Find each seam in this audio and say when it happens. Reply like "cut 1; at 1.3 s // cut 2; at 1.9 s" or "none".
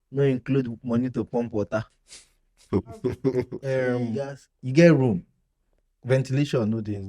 cut 1; at 4.0 s